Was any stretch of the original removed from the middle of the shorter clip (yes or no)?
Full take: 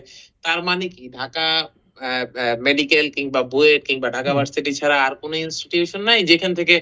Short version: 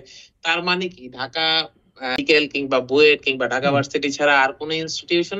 yes